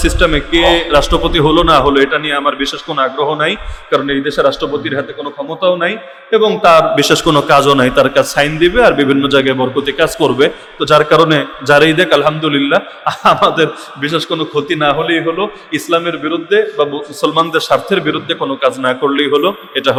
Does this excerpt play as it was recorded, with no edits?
yes; 0 cuts

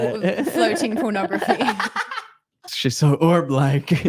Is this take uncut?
no; 1 cut; at 2.6 s

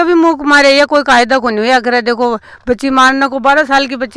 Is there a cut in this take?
no; 0 cuts

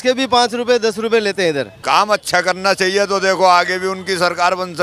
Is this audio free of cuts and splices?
no; 1 cut; at 1.7 s

